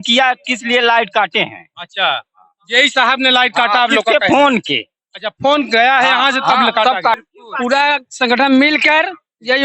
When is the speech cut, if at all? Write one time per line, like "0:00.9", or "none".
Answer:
0:07.3

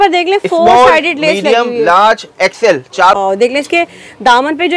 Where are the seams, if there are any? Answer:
0:03.1

